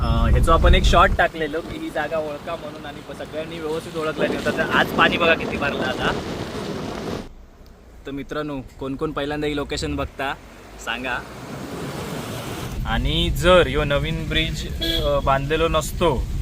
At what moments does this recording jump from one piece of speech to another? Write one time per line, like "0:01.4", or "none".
0:07.2
0:12.7